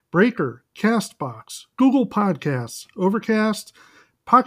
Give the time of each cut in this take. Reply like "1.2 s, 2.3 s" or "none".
none